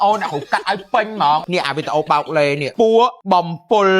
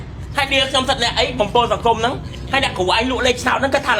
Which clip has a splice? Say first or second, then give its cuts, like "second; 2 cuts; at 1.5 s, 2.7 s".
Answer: first; 3 cuts; at 1.4 s, 2.7 s, 3.2 s